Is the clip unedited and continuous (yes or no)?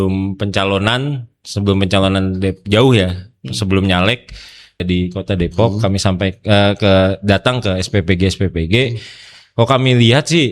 no